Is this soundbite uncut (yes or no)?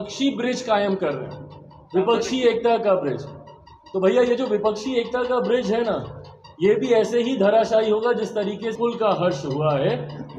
no